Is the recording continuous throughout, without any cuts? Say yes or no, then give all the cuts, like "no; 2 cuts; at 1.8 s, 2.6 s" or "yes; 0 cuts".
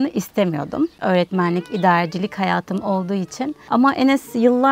no; 2 cuts; at 1.0 s, 3.6 s